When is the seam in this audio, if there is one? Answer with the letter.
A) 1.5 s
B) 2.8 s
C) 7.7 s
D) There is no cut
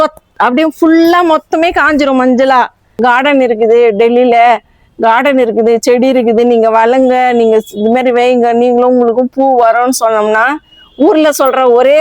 B